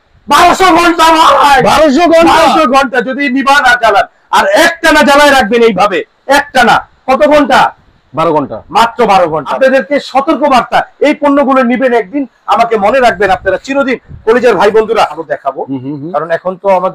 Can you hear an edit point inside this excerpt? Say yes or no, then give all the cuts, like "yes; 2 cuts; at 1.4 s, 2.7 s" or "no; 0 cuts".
yes; 2 cuts; at 9.5 s, 15.2 s